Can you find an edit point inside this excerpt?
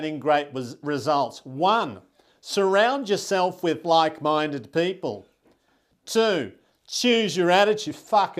no; 0 cuts

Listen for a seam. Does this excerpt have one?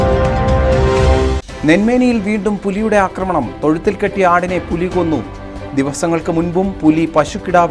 no; 0 cuts

